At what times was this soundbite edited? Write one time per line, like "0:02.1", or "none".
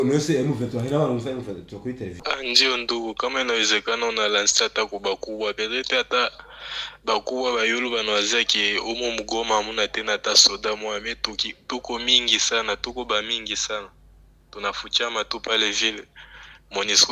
0:02.2